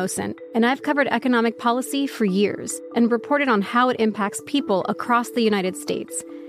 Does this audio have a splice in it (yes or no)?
yes